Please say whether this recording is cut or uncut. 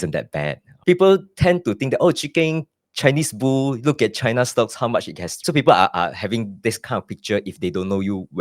cut